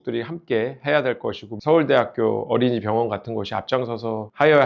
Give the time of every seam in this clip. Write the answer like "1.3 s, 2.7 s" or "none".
1.5 s